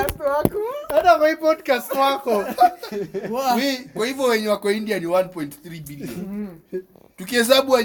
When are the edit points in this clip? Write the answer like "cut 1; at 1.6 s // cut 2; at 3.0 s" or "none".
none